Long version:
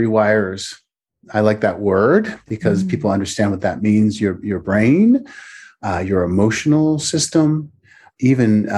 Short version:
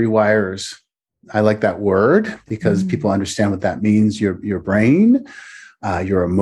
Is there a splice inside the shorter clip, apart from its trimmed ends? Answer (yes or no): no